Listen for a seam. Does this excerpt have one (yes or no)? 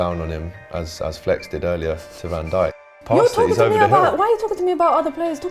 yes